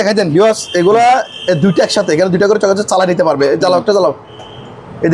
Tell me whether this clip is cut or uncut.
uncut